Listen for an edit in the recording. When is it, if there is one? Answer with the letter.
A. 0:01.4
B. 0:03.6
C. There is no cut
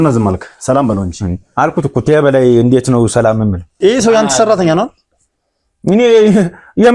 B